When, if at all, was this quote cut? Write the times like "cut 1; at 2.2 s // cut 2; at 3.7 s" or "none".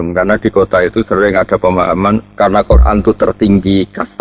cut 1; at 2.3 s